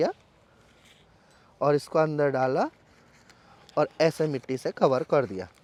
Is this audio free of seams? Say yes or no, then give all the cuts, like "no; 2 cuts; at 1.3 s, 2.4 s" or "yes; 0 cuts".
yes; 0 cuts